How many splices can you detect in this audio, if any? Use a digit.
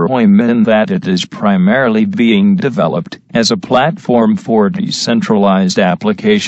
0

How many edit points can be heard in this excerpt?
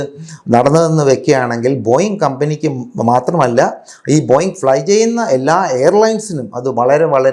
0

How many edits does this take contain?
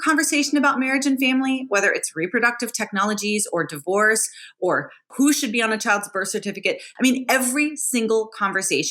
2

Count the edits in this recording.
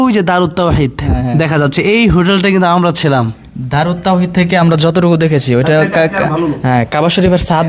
0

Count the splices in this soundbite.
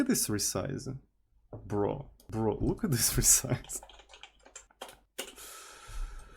2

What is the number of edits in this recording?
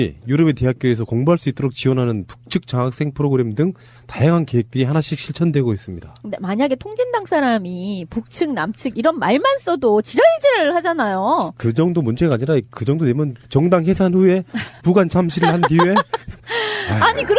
1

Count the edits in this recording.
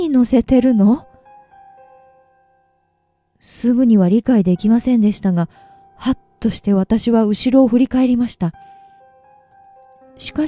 1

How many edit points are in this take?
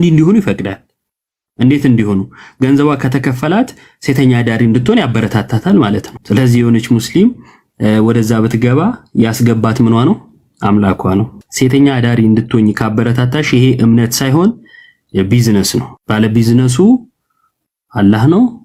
0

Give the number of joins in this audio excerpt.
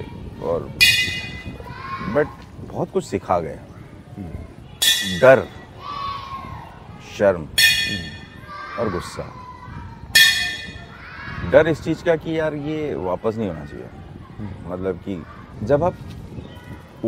2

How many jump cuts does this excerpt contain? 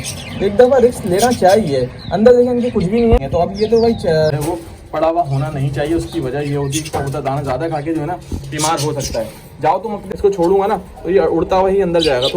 2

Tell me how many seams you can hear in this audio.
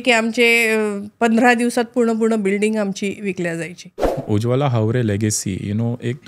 1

